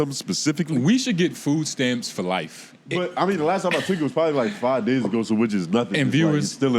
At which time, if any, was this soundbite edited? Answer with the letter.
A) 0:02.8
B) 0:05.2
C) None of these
A